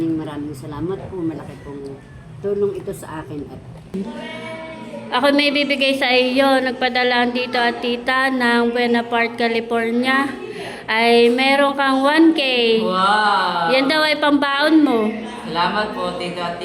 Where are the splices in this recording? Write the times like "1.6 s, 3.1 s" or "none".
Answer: 3.9 s